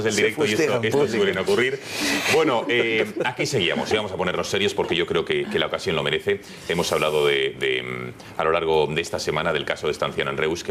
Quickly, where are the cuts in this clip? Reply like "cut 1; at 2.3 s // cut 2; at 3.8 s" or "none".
none